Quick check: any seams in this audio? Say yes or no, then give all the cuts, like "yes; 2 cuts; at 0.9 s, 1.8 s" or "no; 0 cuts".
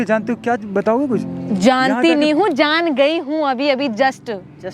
no; 0 cuts